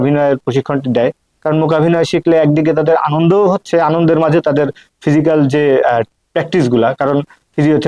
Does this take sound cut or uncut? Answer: uncut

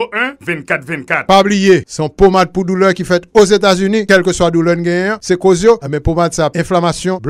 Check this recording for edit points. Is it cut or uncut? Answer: cut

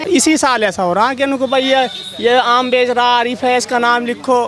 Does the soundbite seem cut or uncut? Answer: uncut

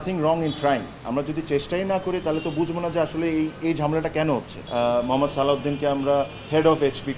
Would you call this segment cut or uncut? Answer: cut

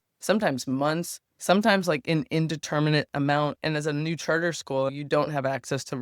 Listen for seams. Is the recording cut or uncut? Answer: cut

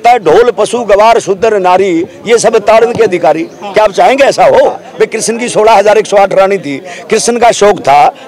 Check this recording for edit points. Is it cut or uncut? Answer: cut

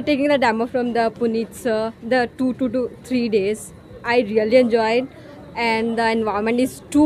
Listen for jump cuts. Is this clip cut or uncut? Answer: uncut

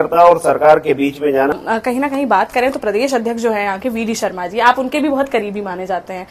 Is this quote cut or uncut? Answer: cut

